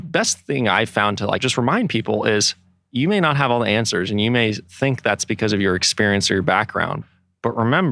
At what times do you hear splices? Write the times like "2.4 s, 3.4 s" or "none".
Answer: 1.4 s, 6.9 s